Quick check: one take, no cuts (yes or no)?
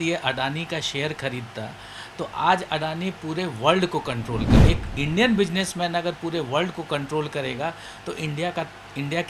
no